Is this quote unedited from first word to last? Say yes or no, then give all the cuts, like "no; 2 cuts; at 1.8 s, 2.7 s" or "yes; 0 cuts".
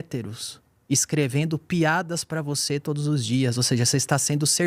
yes; 0 cuts